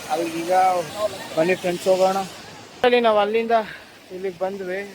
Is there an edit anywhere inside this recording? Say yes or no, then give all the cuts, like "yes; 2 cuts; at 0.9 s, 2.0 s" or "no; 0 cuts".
yes; 2 cuts; at 0.9 s, 2.7 s